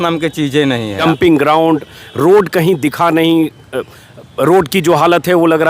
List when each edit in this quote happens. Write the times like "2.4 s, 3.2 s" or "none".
1.0 s